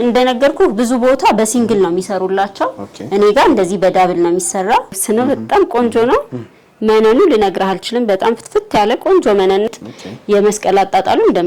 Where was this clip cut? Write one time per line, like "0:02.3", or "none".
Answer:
0:05.0
0:09.7